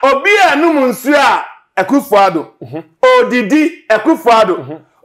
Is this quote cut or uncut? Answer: uncut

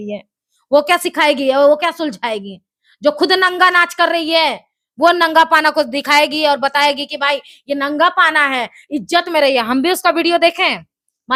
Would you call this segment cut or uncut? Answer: uncut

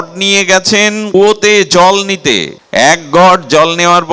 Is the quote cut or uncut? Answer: cut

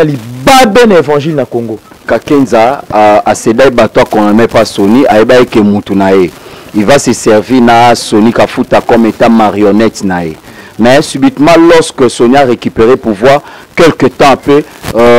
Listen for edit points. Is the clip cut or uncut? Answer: cut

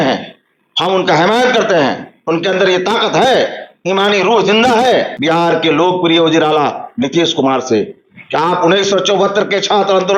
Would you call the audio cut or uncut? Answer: cut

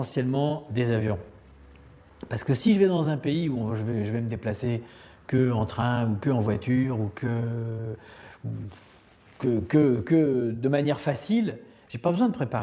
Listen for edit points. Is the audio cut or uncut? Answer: cut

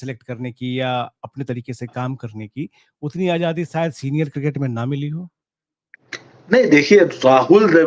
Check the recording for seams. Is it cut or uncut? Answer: uncut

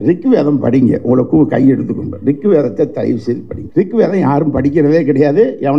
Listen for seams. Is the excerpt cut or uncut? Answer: cut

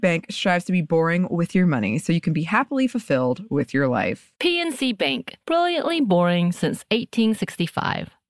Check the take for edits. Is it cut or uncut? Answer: uncut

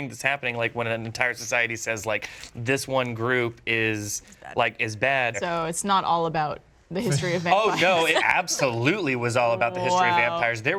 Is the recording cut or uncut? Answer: cut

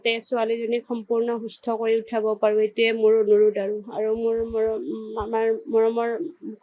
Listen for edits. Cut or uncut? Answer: uncut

